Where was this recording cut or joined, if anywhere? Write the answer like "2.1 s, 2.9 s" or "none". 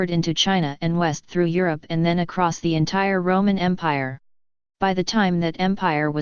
none

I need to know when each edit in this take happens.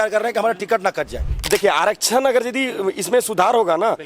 1.4 s

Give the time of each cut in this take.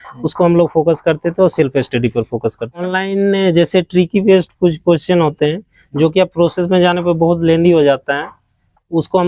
2.8 s

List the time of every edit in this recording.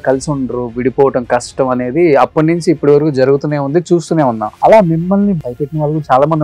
4.5 s, 5.4 s

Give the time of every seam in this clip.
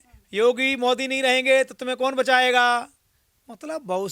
none

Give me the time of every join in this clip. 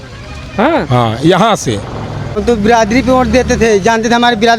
2.4 s

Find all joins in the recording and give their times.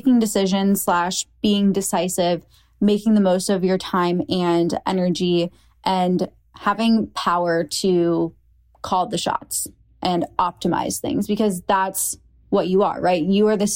none

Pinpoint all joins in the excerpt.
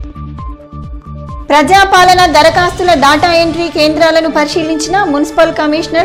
none

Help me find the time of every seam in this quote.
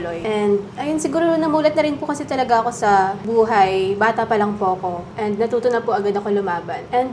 none

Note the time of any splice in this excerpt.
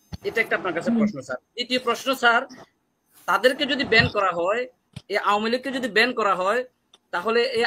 none

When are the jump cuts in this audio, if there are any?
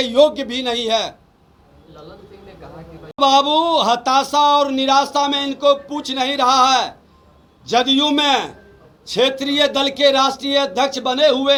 none

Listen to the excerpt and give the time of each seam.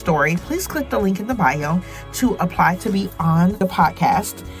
3.6 s

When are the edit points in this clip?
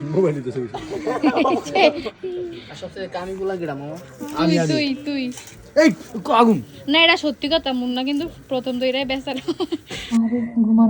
none

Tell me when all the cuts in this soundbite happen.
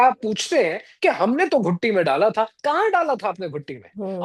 none

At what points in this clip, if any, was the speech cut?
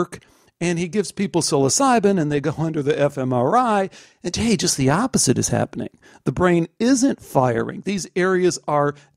none

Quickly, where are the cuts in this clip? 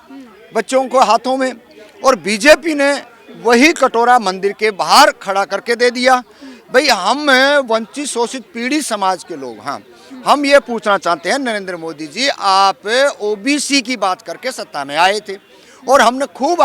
none

